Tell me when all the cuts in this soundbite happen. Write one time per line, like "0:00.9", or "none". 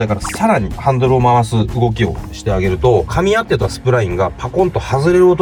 none